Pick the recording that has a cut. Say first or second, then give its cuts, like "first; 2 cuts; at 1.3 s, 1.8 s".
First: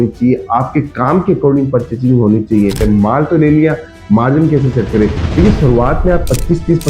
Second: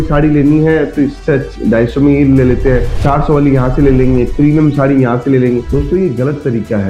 first; 1 cut; at 2.8 s